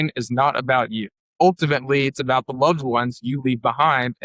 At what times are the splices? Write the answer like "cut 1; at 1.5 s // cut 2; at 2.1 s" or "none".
cut 1; at 1.3 s